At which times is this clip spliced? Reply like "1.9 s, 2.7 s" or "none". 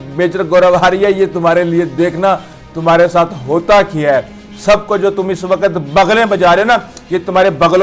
4.4 s

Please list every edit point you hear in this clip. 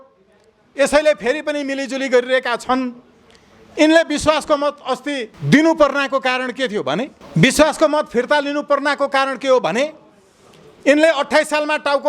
5.3 s, 7.2 s

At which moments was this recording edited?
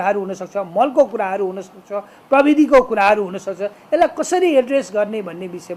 none

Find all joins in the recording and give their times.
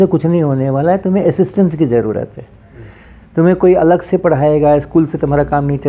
none

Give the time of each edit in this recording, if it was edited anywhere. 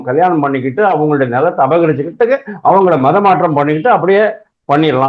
none

